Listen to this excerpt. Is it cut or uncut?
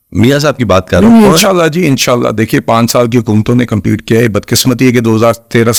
uncut